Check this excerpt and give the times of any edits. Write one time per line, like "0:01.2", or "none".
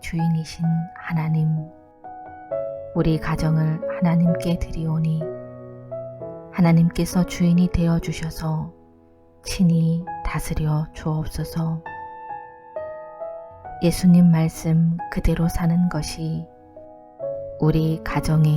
0:01.7
0:02.9
0:11.9
0:13.7